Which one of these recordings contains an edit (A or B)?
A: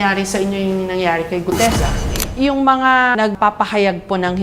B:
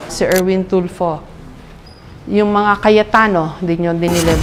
A